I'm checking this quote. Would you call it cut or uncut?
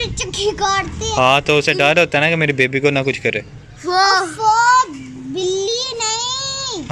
uncut